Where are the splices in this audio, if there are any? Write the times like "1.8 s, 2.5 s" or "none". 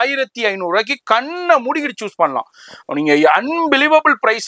none